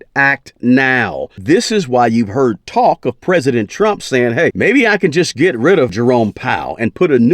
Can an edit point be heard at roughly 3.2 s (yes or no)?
no